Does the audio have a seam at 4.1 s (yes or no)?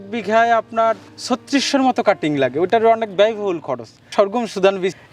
yes